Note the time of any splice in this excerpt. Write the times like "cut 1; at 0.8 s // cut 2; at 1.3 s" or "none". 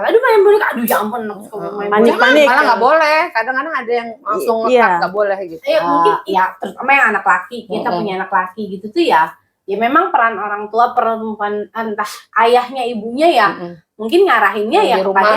cut 1; at 5.9 s